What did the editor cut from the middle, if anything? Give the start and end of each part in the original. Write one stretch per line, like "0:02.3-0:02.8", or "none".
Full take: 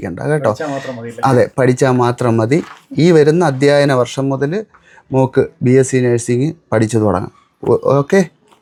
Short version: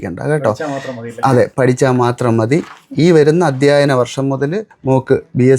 0:04.7-0:04.9